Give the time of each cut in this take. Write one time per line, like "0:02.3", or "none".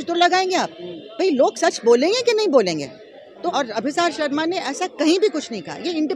0:03.3